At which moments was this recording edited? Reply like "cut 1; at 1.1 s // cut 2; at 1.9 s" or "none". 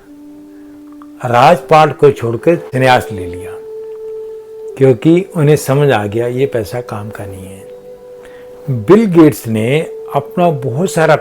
cut 1; at 2.7 s